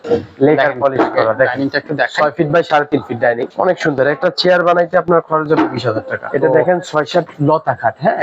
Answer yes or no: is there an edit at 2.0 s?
no